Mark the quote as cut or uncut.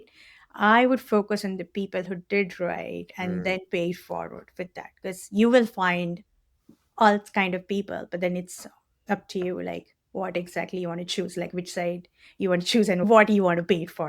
cut